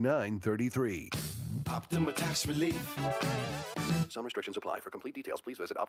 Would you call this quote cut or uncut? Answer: uncut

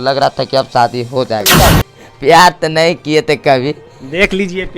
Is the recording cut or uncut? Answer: cut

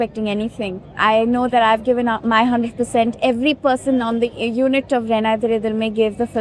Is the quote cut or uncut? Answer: uncut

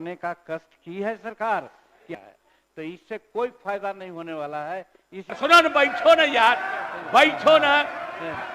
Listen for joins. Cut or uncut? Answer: cut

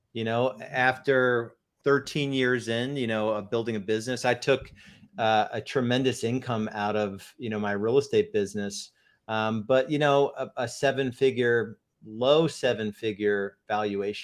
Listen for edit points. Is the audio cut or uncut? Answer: cut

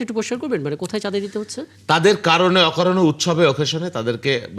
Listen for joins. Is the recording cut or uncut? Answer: uncut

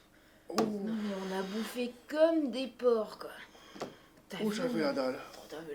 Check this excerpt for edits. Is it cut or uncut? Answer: cut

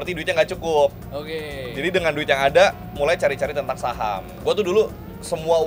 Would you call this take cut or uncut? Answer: cut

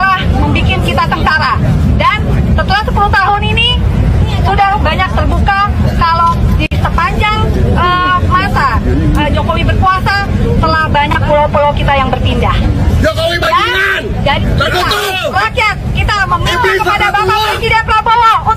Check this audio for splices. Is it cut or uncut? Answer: cut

